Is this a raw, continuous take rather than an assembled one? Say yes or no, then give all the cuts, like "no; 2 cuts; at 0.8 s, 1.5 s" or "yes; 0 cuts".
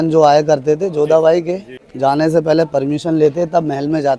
no; 1 cut; at 1.9 s